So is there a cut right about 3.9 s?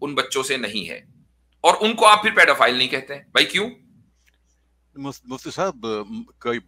no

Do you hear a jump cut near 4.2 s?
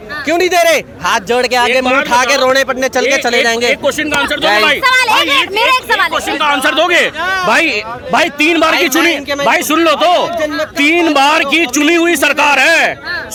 no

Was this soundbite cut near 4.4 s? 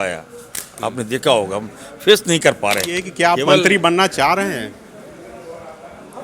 no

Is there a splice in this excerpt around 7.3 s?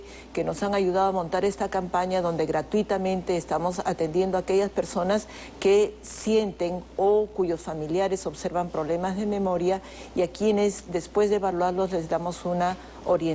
yes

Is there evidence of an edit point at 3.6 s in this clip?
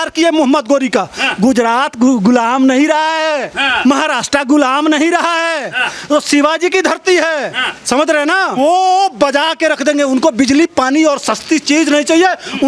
yes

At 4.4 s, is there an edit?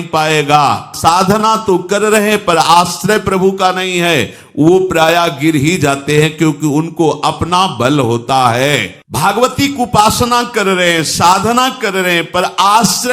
no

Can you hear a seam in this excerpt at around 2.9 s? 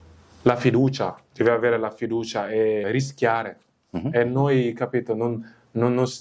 yes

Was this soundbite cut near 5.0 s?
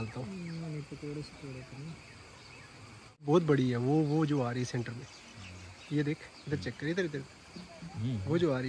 no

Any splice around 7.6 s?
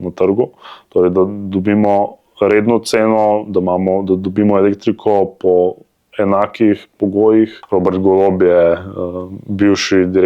yes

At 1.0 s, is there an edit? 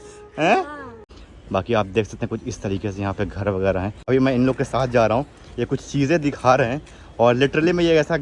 yes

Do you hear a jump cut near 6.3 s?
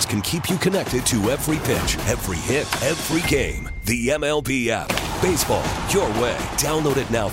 no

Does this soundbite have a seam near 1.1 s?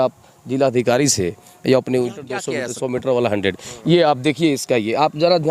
no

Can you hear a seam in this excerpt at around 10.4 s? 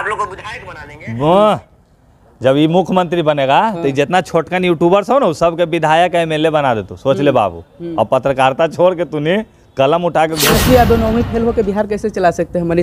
yes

